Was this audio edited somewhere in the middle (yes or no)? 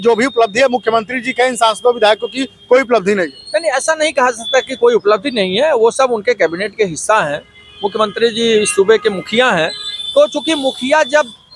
no